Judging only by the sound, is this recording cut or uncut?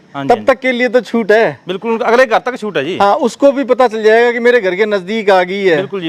uncut